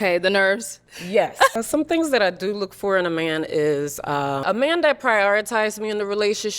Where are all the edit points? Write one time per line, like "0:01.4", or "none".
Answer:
0:01.6
0:04.4

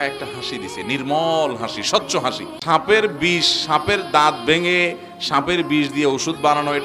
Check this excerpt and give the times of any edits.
0:02.5

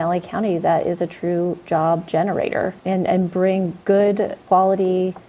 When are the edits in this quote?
0:03.8
0:04.4

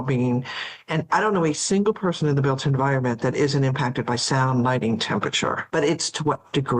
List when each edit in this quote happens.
0:05.6

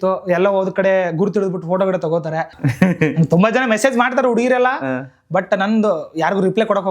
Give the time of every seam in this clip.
0:02.5

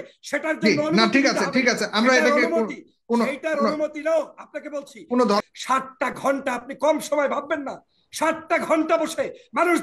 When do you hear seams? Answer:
0:05.4

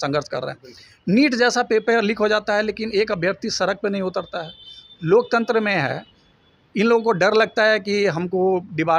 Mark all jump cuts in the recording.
none

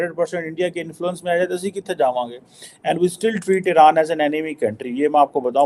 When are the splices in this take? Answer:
none

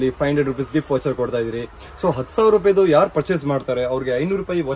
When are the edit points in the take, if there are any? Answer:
none

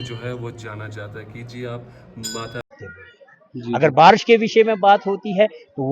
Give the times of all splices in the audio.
0:02.6

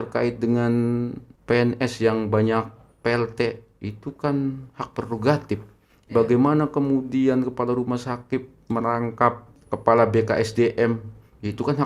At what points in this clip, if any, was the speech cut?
0:01.3
0:09.5

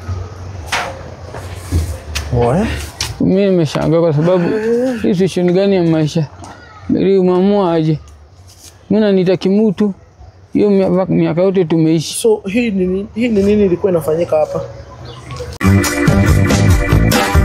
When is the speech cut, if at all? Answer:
0:15.4

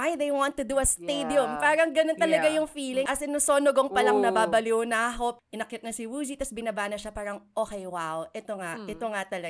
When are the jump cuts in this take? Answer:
0:03.1
0:05.3

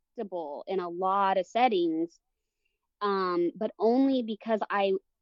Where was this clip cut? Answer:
none

